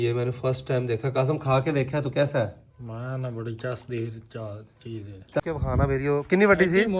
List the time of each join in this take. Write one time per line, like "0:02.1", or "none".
0:05.4